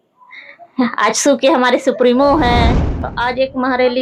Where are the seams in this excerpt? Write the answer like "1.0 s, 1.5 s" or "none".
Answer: 2.9 s